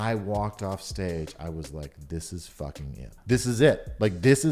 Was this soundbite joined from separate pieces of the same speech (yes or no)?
yes